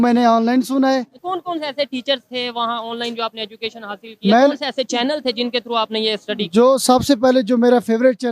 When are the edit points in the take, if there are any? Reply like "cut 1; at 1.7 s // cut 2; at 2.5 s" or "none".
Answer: cut 1; at 1.2 s